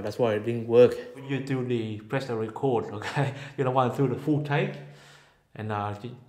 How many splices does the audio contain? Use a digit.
1